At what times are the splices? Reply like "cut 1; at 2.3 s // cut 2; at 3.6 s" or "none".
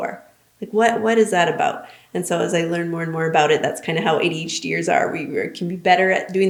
none